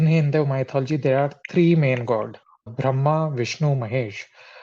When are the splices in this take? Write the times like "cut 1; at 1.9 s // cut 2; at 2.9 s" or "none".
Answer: cut 1; at 2.7 s